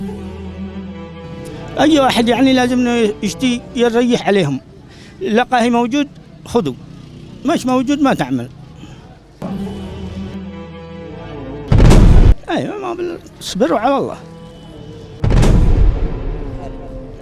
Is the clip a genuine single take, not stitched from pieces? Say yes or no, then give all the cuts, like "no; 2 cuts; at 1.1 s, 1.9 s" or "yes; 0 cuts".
no; 2 cuts; at 9.4 s, 12.3 s